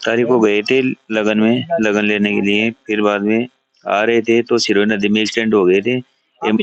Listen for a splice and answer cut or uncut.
uncut